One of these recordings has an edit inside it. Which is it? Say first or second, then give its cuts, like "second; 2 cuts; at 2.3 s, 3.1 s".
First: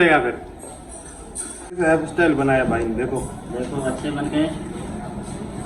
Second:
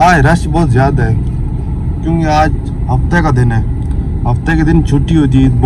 first; 1 cut; at 1.8 s